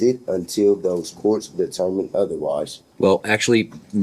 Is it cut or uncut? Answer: cut